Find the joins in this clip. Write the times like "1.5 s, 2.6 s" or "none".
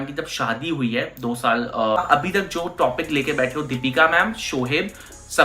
2.0 s